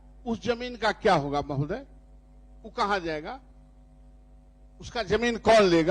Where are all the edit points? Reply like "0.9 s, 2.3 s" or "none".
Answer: none